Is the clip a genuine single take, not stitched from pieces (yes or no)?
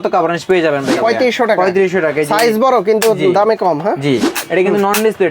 no